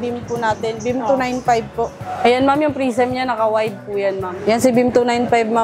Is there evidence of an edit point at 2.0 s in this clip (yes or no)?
yes